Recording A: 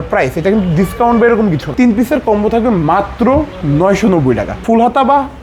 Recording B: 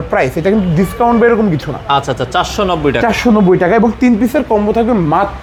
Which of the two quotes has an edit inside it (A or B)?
A